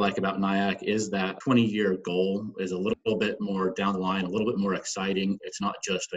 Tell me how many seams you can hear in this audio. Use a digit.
2